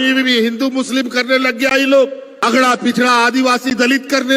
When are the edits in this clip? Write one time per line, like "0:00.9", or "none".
0:02.3